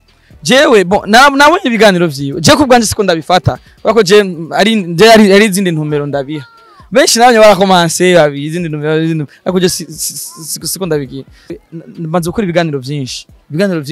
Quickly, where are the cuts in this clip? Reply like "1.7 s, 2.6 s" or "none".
11.6 s